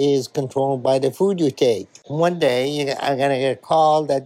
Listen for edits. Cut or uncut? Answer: uncut